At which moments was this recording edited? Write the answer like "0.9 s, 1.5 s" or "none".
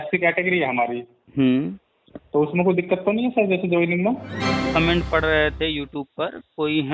4.6 s